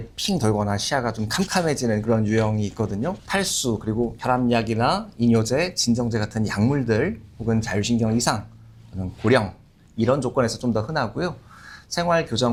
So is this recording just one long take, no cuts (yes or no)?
yes